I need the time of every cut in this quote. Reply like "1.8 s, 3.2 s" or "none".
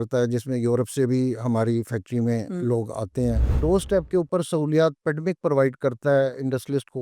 3.5 s